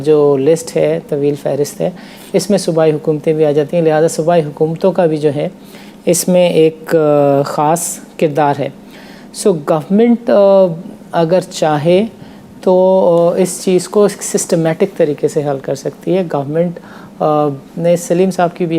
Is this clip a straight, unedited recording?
yes; 0 cuts

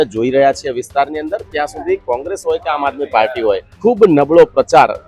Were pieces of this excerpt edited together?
yes; 1 cut; at 3.7 s

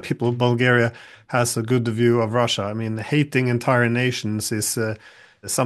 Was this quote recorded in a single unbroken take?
yes; 0 cuts

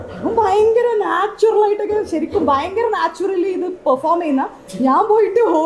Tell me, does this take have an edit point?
no; 0 cuts

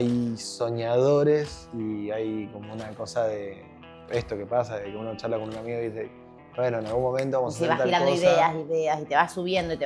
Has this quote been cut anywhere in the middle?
no; 0 cuts

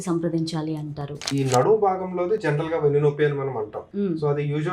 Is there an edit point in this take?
yes; 2 cuts; at 1.3 s, 3.8 s

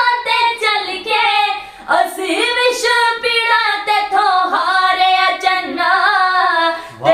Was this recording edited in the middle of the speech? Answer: no; 0 cuts

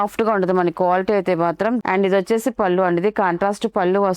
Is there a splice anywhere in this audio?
yes; 1 cut; at 1.8 s

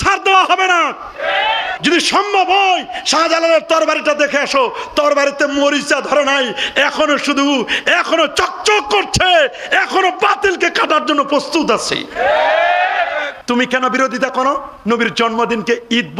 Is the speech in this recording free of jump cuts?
no; 2 cuts; at 1.7 s, 13.3 s

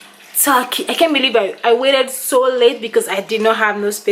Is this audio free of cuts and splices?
yes; 0 cuts

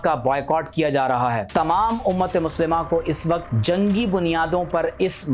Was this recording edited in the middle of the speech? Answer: yes; 2 cuts; at 1.5 s, 3.5 s

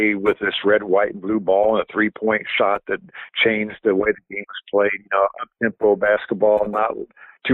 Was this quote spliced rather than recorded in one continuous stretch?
no; 0 cuts

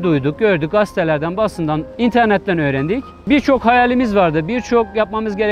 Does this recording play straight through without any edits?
no; 2 cuts; at 1.9 s, 3.1 s

